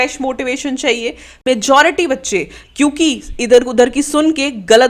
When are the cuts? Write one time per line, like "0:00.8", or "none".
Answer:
0:01.4